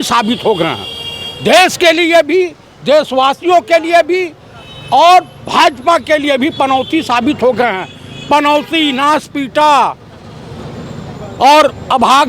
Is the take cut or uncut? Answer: uncut